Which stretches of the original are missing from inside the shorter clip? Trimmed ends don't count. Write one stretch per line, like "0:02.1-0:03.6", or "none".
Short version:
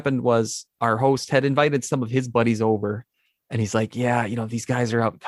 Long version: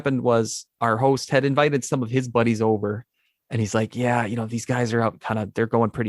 none